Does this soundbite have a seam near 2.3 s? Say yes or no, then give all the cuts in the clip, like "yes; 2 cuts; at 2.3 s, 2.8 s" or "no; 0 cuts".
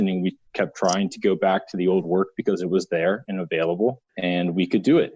no; 1 cut; at 4.1 s